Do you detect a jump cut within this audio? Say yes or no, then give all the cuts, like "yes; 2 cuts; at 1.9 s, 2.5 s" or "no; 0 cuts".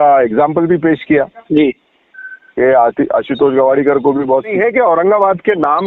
yes; 1 cut; at 4.5 s